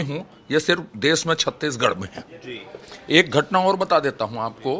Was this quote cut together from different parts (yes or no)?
no